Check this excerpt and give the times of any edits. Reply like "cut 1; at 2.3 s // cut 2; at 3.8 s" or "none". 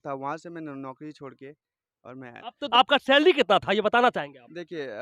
cut 1; at 2.6 s